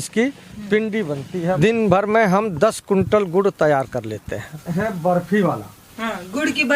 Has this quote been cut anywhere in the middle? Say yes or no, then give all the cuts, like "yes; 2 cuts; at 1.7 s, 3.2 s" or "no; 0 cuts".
yes; 2 cuts; at 1.6 s, 4.6 s